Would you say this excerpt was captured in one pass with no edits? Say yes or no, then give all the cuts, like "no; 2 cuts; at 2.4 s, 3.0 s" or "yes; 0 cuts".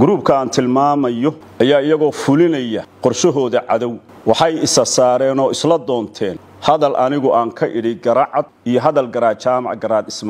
no; 5 cuts; at 1.4 s, 2.9 s, 4.1 s, 6.5 s, 8.6 s